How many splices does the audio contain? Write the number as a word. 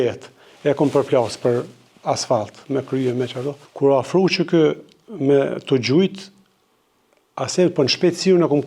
one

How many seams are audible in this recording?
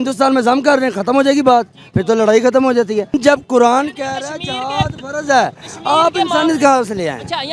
one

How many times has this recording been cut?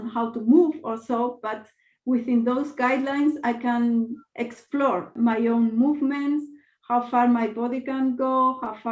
one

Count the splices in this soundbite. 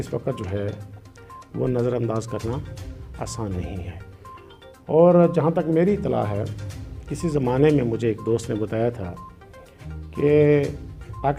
zero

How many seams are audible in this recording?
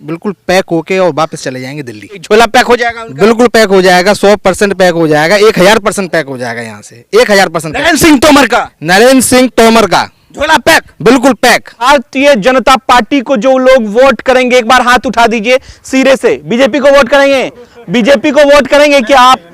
two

